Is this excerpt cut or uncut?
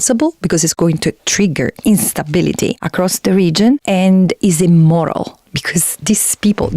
cut